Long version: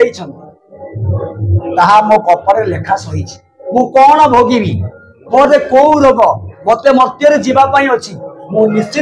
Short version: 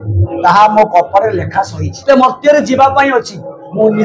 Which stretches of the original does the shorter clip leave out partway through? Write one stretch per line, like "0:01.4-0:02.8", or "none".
0:03.3-0:06.8